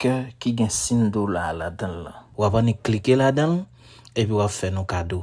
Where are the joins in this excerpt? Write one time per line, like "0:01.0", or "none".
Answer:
none

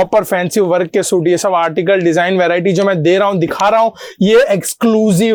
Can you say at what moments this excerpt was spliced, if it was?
none

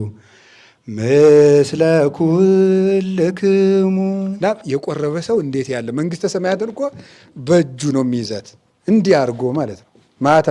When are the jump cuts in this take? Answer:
0:04.3

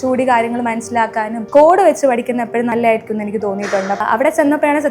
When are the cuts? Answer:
0:01.4
0:02.7
0:04.0

